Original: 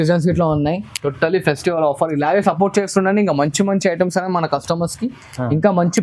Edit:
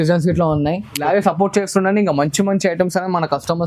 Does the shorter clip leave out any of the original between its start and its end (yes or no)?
yes